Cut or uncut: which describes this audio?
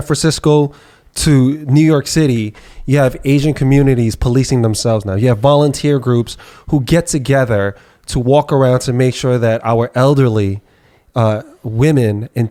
uncut